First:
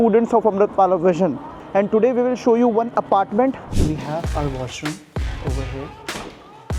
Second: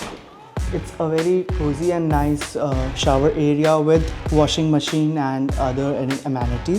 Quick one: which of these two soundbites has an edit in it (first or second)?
first